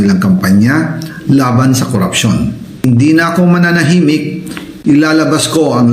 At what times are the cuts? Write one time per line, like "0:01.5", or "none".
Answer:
0:02.8

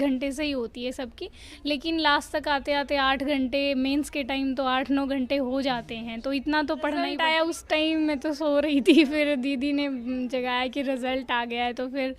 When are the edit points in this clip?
0:07.2

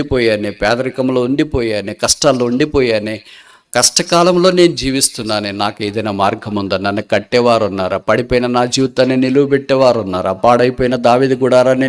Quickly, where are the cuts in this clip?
none

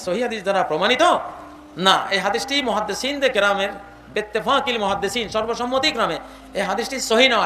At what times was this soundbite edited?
none

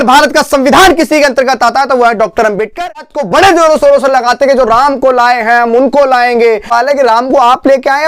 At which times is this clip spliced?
0:03.1
0:06.7

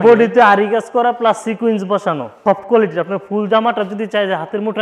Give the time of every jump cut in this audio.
0:02.4

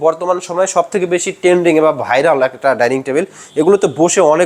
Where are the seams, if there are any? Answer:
none

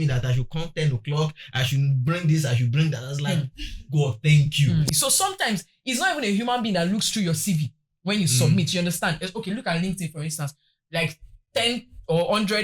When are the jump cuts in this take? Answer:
0:04.9

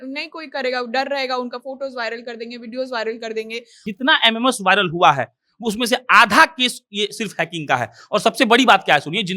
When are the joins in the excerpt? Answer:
0:03.9

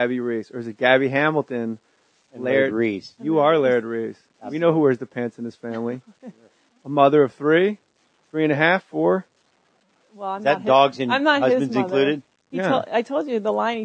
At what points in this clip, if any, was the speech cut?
0:01.2

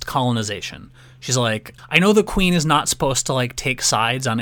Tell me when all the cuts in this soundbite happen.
0:01.7

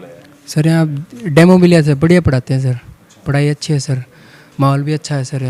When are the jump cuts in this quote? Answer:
none

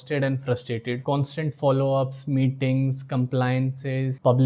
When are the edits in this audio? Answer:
none

